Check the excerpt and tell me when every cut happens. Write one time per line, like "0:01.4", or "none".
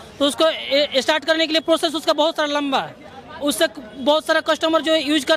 none